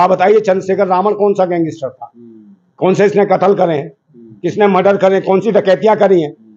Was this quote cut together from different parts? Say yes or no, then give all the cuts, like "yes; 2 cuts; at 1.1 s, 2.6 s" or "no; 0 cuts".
no; 0 cuts